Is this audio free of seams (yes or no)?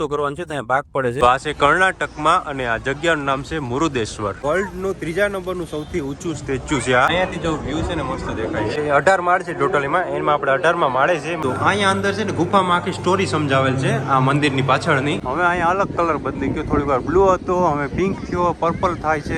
no